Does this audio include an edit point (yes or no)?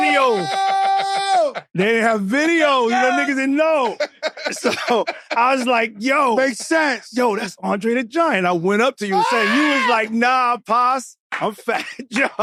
no